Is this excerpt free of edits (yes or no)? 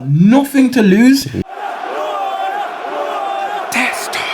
no